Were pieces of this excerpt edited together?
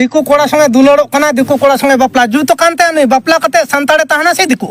no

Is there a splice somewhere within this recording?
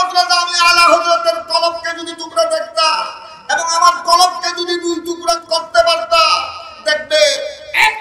yes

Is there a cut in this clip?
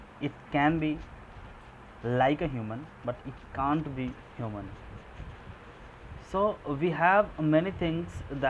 no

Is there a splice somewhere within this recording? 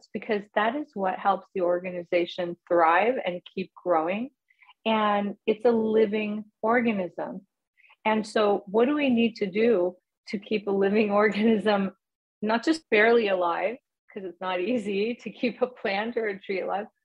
yes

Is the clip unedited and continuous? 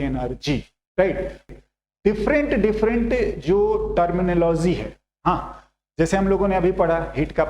no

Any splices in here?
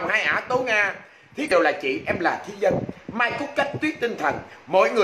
yes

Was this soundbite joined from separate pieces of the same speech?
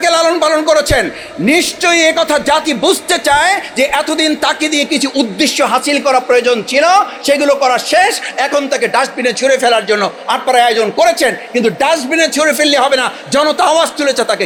no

